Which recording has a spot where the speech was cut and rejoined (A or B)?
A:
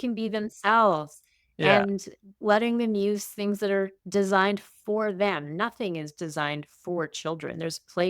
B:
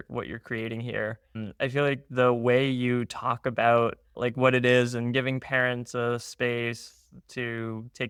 A